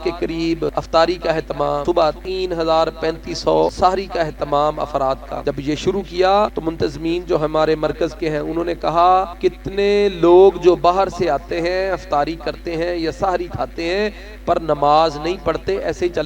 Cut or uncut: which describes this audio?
cut